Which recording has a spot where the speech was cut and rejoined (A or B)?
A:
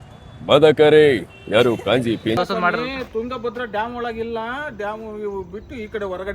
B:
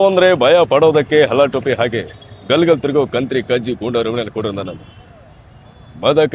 A